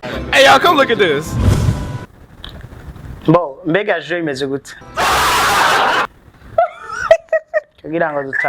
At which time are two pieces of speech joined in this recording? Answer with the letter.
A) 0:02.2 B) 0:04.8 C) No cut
B